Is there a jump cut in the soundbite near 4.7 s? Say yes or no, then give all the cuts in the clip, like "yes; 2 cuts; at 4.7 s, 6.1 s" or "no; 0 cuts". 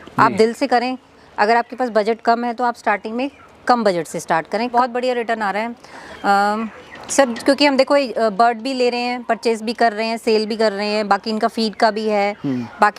yes; 1 cut; at 4.7 s